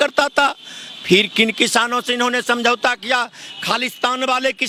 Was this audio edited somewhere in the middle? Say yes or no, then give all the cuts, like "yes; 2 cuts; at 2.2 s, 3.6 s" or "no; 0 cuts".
no; 0 cuts